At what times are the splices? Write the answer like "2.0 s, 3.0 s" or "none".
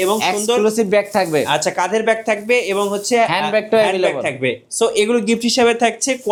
none